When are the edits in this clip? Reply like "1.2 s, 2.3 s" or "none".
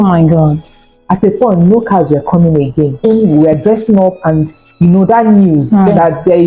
3.0 s, 5.7 s